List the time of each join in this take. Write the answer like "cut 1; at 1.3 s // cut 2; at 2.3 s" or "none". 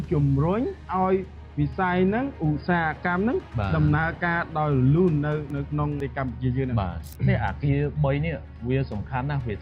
cut 1; at 6.0 s // cut 2; at 7.0 s